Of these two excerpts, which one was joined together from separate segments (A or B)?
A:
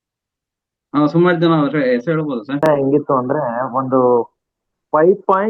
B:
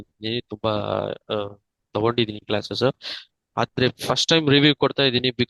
A